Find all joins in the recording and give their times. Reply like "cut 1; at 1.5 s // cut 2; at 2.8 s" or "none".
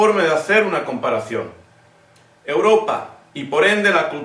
cut 1; at 1.2 s